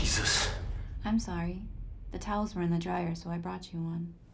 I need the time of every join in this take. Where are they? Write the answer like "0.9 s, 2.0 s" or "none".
none